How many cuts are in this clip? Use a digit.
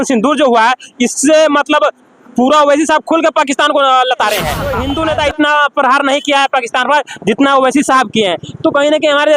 1